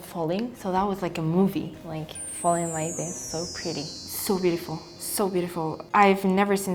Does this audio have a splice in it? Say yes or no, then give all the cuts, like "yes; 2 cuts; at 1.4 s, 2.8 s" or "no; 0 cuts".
no; 0 cuts